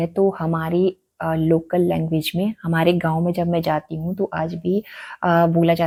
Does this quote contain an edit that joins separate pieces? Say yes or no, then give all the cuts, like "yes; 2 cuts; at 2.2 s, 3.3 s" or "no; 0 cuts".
no; 0 cuts